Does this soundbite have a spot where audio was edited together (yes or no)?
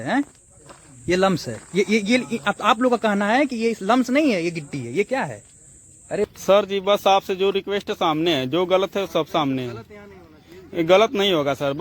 yes